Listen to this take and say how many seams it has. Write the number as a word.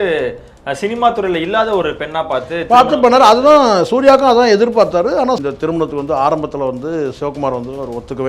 one